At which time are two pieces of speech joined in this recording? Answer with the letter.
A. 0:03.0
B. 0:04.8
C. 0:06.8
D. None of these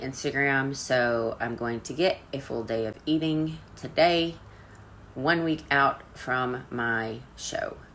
A